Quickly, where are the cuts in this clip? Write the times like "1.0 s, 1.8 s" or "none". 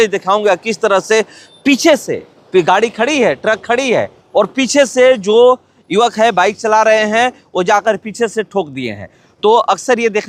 none